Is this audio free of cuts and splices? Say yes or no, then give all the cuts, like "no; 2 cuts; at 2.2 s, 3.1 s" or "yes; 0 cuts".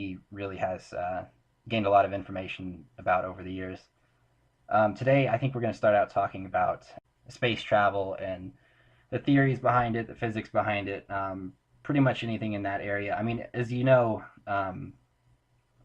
no; 1 cut; at 2.3 s